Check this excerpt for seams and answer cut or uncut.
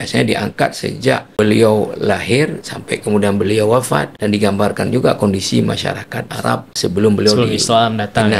cut